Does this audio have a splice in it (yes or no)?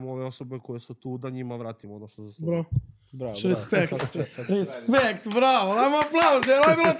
no